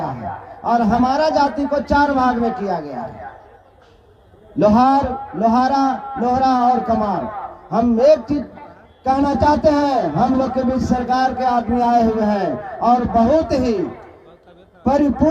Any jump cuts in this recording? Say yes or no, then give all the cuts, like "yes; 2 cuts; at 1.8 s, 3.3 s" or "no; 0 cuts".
no; 0 cuts